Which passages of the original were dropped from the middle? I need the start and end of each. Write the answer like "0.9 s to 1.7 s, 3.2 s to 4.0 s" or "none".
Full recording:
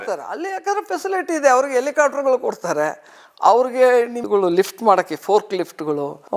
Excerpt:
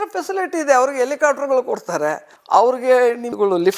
3.1 s to 3.2 s